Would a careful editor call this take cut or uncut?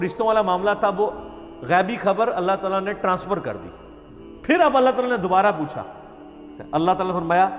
cut